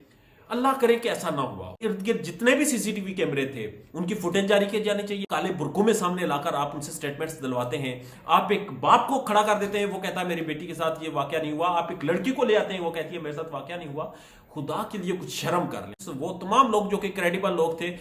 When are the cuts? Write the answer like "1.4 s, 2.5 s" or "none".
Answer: 1.8 s, 5.3 s, 16.0 s